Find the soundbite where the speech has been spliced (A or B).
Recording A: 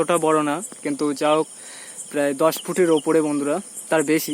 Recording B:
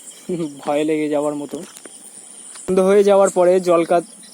B